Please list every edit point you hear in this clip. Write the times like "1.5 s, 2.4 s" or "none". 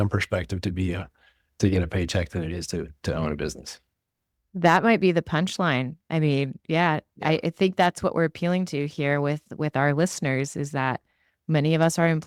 none